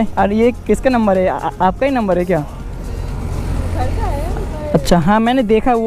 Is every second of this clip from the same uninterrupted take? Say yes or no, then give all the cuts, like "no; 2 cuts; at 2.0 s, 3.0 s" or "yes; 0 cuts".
yes; 0 cuts